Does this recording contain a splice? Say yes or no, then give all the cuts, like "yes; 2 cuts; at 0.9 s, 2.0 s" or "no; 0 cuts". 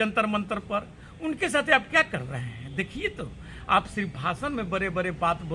no; 0 cuts